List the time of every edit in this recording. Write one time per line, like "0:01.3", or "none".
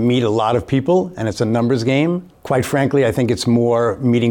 0:02.3